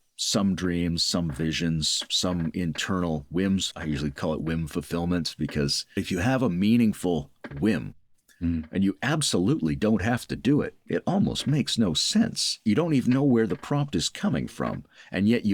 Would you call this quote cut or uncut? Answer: cut